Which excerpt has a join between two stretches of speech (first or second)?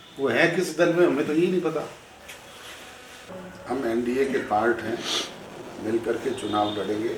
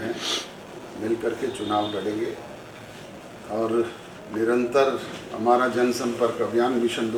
first